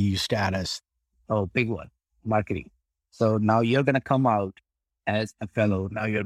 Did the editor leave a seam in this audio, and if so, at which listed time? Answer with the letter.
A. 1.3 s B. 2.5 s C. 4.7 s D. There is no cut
D